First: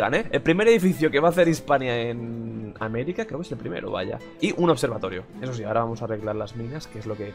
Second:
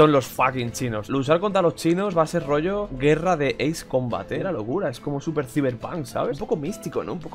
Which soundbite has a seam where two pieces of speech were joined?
second; 3 cuts; at 1.0 s, 4.4 s, 6.4 s

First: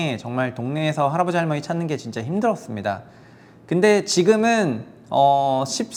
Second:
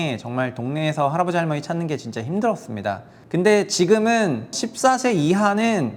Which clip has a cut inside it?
second; 2 cuts; at 3.1 s, 4.6 s

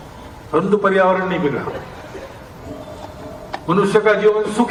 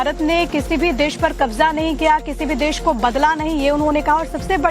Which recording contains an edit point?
second; 1 cut; at 3.4 s

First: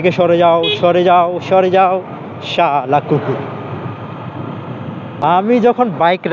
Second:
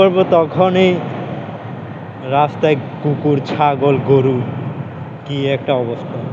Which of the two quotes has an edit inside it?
first; 1 cut; at 5.2 s

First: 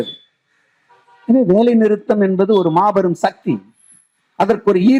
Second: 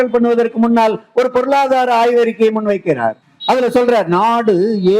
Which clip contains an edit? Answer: second; 1 cut; at 3.3 s

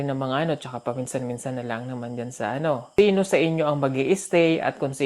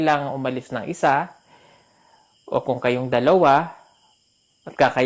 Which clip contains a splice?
first; 1 cut; at 2.9 s

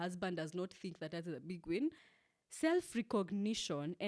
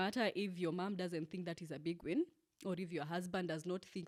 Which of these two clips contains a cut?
first; 1 cut; at 2.1 s

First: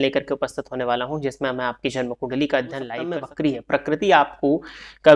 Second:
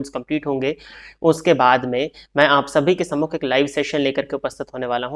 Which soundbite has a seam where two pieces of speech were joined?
first; 1 cut; at 3.0 s

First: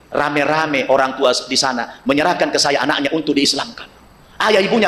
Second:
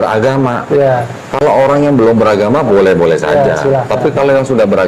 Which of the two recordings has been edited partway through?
second; 1 cut; at 1.1 s

